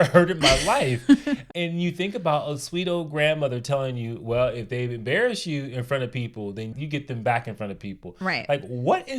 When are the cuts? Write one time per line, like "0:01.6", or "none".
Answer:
0:01.4
0:06.7